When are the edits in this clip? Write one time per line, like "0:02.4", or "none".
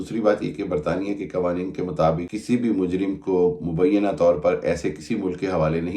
0:02.3

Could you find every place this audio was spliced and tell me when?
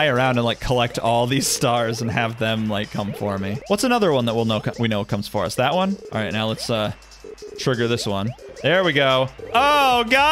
0:03.6
0:06.0
0:08.4
0:09.4

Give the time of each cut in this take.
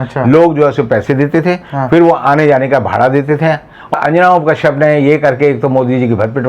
0:03.9

